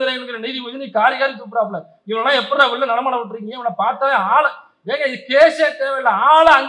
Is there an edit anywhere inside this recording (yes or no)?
no